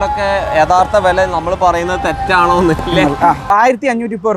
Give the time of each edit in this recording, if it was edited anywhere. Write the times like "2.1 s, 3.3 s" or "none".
3.4 s